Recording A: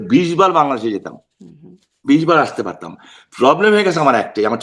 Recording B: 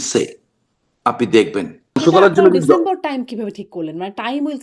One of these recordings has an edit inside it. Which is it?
B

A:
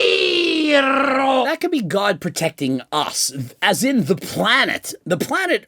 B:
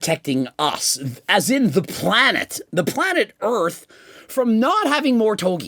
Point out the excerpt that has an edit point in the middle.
A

